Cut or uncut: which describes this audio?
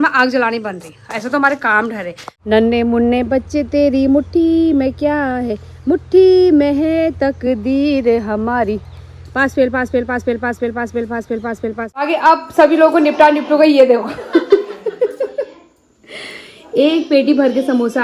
cut